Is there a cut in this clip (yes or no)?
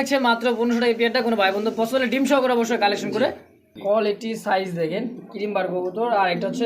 yes